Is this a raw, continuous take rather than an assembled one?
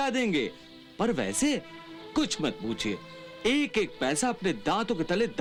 yes; 0 cuts

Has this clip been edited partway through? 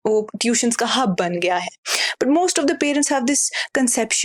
no; 0 cuts

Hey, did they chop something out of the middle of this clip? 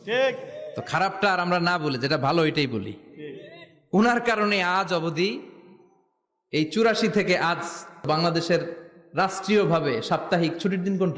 yes; 1 cut; at 8.0 s

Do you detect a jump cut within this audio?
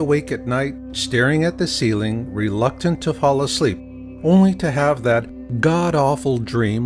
yes; 1 cut; at 3.4 s

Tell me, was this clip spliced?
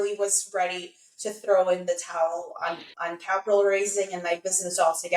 no; 0 cuts

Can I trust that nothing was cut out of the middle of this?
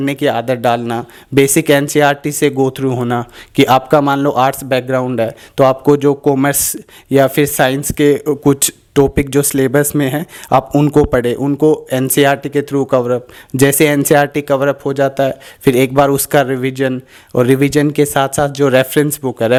yes; 0 cuts

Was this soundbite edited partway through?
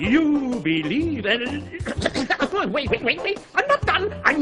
no; 0 cuts

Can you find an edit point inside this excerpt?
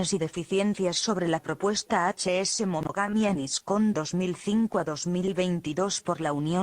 yes; 1 cut; at 4.8 s

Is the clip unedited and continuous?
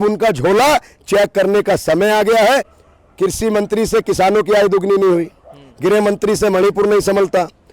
no; 1 cut; at 2.8 s

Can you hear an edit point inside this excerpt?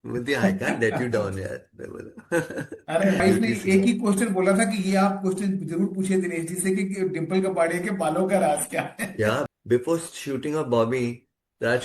yes; 2 cuts; at 3.2 s, 9.5 s

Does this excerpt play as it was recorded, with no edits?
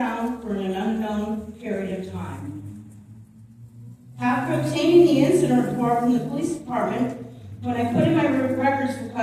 yes; 0 cuts

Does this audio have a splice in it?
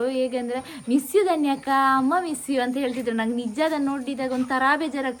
no; 0 cuts

